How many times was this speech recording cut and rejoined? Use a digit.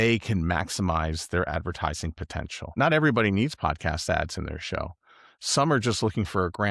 1